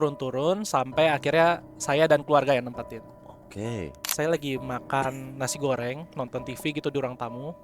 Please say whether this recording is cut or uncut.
cut